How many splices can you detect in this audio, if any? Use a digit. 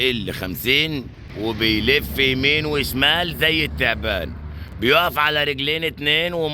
1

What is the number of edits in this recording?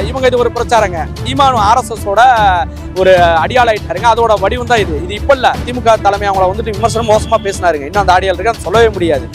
2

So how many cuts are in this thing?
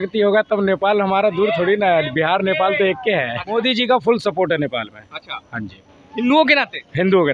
1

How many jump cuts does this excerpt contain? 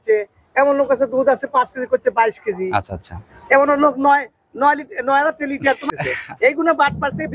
1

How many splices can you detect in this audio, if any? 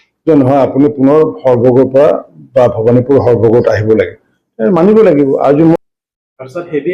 1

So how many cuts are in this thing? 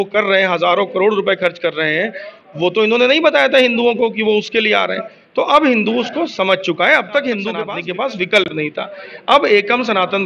1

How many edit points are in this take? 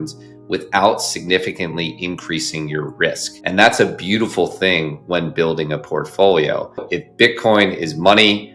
2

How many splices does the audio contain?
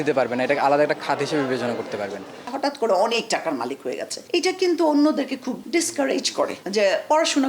4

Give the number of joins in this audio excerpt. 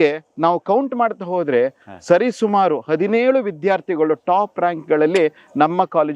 0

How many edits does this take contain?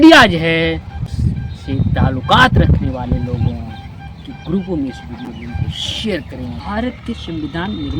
2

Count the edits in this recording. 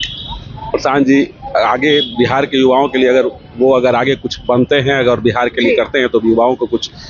0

